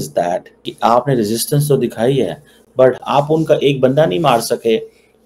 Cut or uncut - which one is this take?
cut